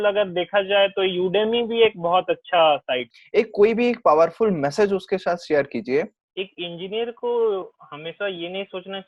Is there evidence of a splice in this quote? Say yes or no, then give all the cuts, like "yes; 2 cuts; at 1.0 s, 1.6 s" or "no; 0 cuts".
yes; 2 cuts; at 3.1 s, 6.2 s